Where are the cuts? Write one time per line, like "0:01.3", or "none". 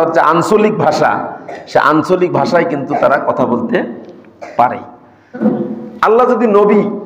0:05.4